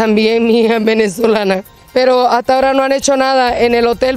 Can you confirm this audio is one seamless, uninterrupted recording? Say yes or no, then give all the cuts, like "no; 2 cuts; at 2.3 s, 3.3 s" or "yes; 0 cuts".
no; 1 cut; at 1.6 s